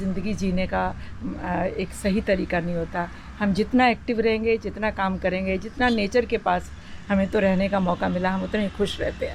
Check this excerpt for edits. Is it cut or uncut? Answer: uncut